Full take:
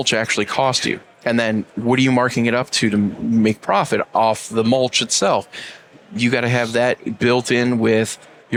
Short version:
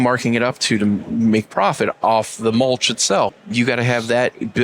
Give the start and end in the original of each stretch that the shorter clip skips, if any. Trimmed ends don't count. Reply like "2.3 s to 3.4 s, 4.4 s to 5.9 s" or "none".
5.5 s to 6.1 s